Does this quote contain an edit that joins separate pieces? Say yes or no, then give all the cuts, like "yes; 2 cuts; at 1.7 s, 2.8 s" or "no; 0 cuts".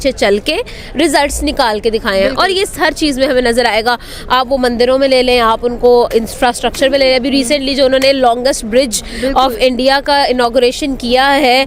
no; 0 cuts